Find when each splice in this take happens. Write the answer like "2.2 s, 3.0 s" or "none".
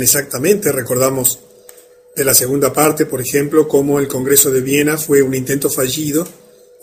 none